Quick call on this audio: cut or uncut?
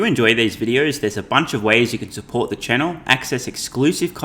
uncut